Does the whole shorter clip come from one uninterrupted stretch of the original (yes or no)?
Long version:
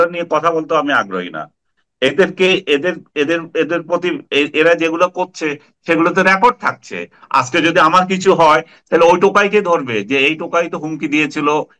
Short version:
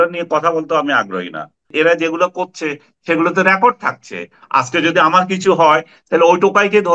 no